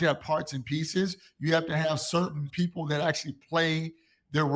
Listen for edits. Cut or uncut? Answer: cut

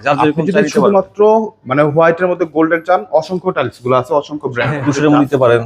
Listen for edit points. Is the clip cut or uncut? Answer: cut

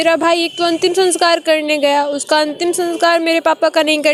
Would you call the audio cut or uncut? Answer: uncut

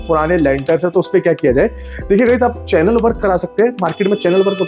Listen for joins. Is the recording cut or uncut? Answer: uncut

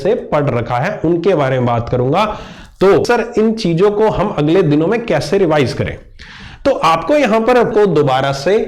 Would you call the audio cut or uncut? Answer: cut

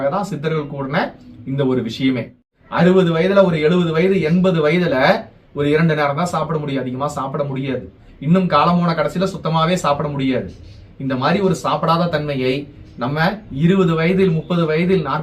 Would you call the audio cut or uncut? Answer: cut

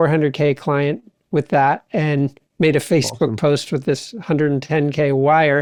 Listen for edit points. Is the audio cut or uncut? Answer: uncut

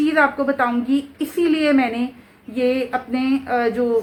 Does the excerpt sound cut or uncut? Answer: uncut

